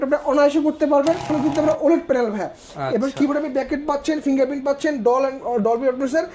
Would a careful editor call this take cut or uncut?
cut